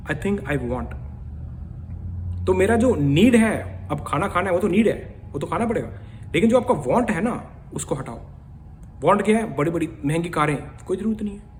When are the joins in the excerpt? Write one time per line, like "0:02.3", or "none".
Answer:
none